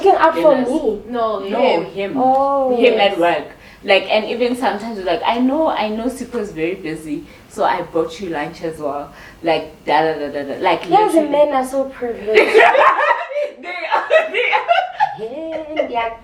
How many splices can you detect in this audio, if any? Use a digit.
0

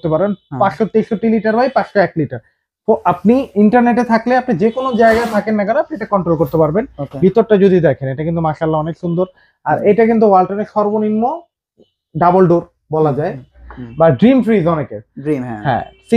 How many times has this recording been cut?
1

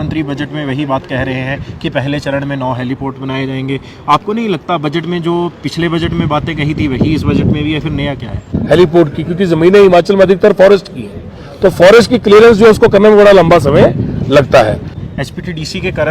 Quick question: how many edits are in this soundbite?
2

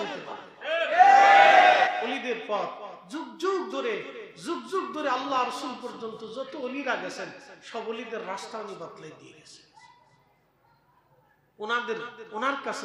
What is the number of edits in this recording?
1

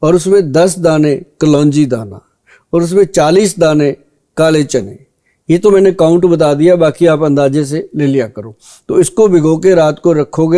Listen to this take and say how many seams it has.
0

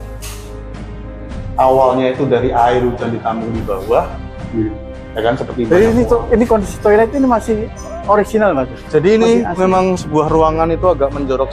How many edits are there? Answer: 1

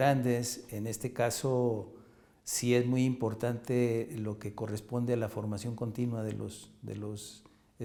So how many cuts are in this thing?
0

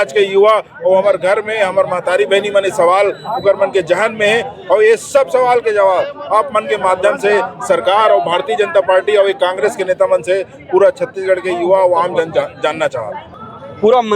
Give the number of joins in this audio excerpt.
1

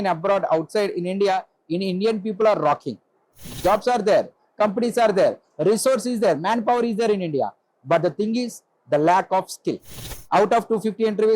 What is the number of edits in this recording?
2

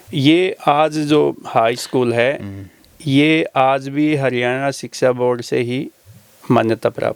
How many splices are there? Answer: 0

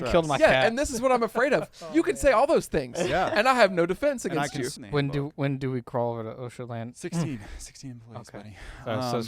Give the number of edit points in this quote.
1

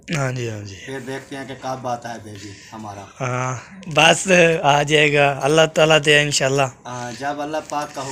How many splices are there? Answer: 0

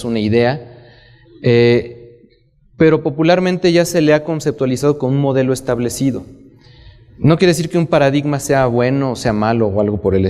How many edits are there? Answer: 1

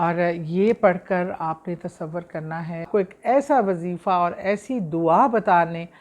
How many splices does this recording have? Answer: 1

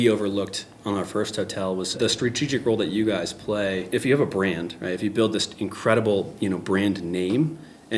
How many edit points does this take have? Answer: 2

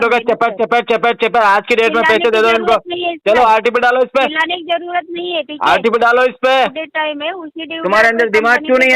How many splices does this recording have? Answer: 1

